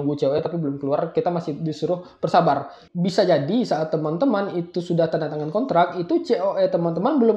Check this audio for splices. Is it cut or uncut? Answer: cut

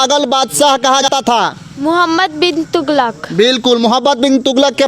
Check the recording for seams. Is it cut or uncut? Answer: cut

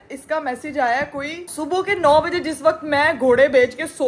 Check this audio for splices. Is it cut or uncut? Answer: cut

